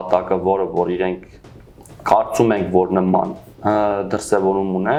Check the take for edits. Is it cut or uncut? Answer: uncut